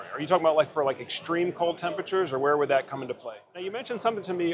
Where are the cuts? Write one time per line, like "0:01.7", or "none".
0:03.4